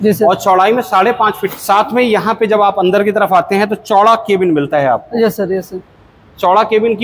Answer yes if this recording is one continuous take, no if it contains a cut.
no